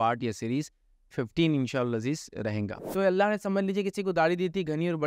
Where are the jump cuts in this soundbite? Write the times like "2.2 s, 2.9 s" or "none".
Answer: 2.8 s